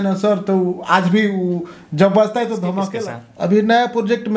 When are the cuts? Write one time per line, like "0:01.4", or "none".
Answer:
0:02.9